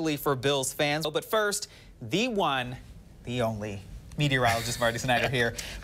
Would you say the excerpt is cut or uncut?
cut